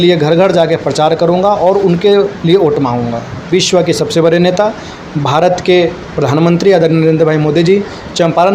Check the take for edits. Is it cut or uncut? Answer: cut